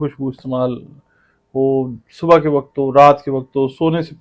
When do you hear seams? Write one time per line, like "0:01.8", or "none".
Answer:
none